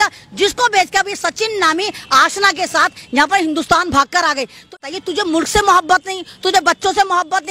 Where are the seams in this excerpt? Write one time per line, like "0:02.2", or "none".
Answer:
0:04.8

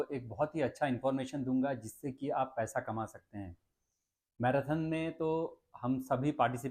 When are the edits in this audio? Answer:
none

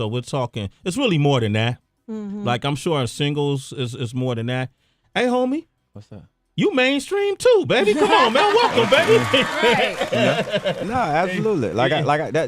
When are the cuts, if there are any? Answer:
none

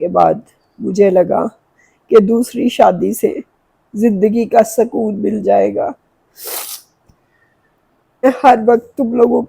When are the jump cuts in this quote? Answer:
0:08.2

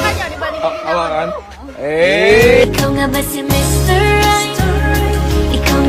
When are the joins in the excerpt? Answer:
none

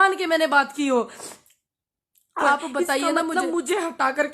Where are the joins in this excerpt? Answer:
0:03.3

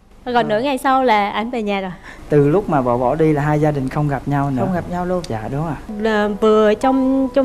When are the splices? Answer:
0:02.2
0:05.8

